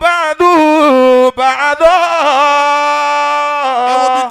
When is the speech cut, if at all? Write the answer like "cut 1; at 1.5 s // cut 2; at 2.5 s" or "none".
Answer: none